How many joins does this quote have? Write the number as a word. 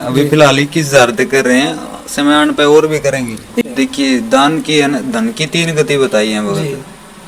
one